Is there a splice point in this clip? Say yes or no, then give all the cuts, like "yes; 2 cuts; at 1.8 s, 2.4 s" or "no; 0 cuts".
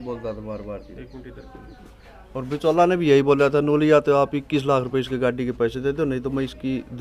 no; 0 cuts